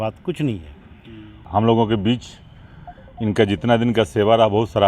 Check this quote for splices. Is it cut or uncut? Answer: cut